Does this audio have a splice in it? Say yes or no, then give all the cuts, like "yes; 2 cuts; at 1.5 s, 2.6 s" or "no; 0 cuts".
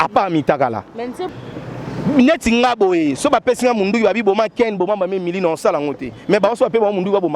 yes; 1 cut; at 1.2 s